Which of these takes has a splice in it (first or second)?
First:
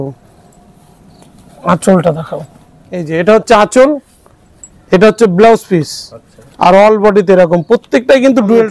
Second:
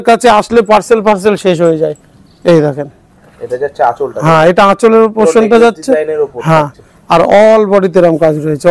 first